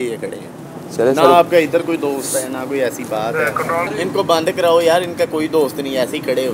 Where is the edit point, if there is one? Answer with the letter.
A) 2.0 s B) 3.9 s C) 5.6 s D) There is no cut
B